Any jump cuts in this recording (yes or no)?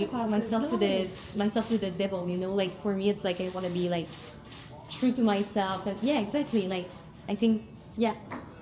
no